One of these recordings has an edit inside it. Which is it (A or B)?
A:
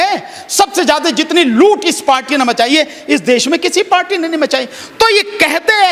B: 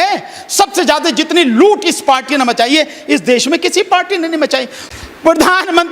B